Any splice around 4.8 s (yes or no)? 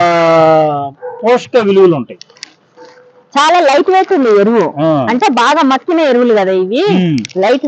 no